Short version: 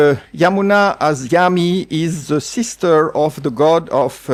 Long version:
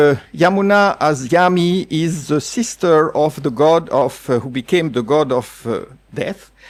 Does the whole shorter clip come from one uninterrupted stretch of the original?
yes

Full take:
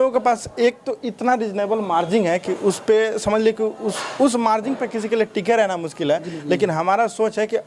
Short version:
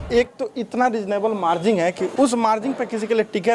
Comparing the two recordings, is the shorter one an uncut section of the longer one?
no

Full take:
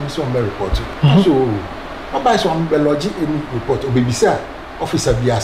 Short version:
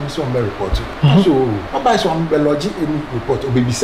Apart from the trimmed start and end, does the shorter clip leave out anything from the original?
yes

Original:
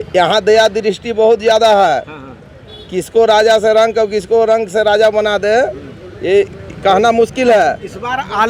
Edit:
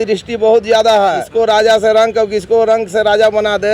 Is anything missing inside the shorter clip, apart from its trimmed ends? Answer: yes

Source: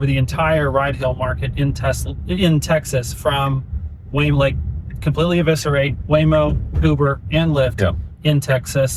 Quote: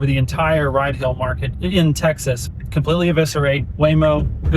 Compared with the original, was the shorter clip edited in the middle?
yes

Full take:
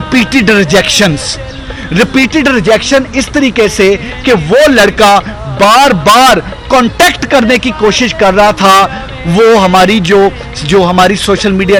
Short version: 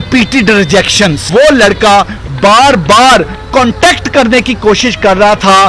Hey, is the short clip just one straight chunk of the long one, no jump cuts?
no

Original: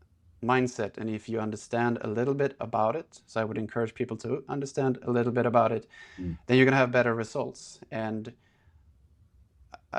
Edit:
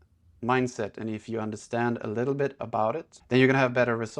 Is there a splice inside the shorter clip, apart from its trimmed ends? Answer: yes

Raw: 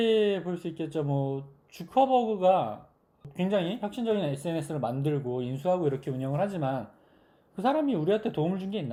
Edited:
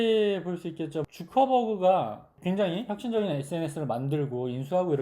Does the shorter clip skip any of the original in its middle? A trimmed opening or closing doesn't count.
yes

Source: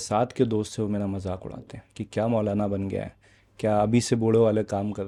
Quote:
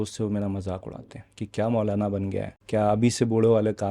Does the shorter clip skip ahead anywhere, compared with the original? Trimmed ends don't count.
yes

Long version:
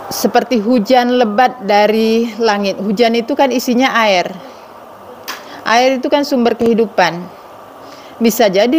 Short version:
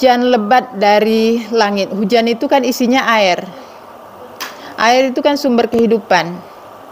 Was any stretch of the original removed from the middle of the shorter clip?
no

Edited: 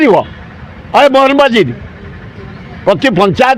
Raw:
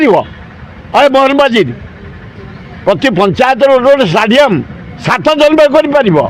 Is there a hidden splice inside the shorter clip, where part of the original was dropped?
no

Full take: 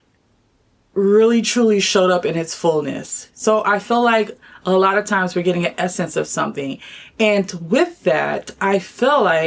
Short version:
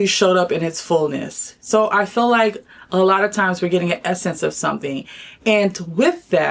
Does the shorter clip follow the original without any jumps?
yes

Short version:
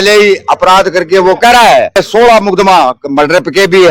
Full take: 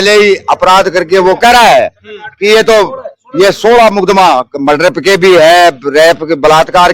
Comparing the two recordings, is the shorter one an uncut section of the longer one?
no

